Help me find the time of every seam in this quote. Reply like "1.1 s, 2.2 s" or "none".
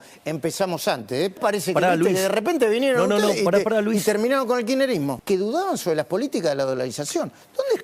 1.4 s, 5.2 s

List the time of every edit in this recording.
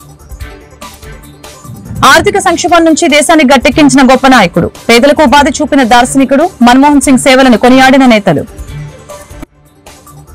none

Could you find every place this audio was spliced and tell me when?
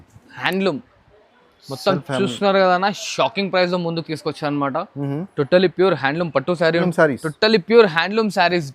6.8 s

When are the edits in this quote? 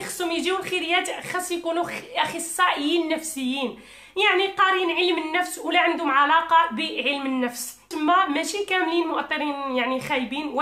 7.9 s

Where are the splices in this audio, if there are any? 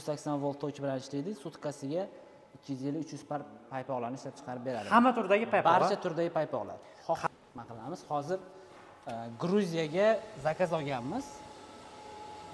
7.3 s

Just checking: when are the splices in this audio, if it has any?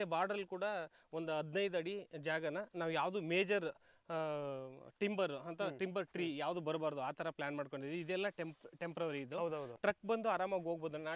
9.8 s

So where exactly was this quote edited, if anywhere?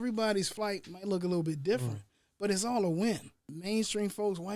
3.6 s

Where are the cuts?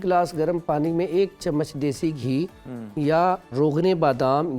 none

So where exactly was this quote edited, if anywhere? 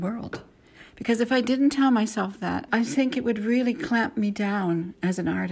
2.7 s

